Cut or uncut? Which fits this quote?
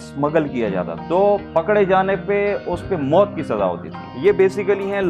cut